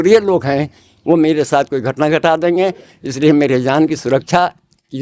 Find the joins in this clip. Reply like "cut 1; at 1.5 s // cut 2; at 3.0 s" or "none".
none